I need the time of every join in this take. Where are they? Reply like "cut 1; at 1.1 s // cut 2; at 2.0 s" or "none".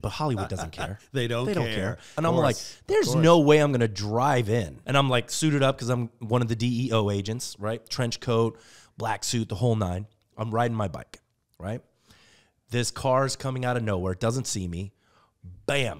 cut 1; at 2.2 s // cut 2; at 4.8 s